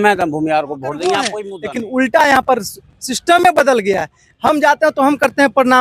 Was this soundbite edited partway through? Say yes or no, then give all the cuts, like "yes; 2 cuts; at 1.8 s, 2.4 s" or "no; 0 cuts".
yes; 1 cut; at 1.4 s